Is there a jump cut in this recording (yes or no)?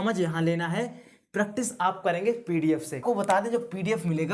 yes